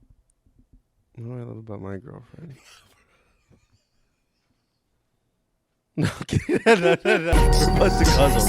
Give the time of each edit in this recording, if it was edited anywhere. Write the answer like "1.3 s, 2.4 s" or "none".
7.3 s